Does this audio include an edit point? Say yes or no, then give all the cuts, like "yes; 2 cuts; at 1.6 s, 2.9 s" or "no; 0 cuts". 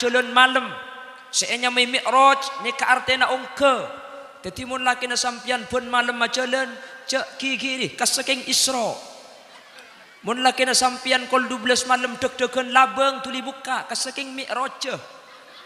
no; 0 cuts